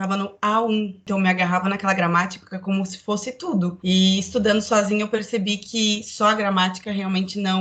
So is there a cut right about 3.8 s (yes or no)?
yes